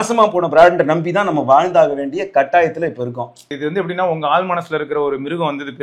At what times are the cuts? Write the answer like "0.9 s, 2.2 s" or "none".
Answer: 3.6 s